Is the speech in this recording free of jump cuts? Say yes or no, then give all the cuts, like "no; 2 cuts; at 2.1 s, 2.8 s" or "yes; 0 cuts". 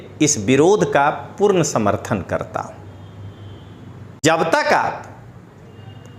no; 1 cut; at 4.2 s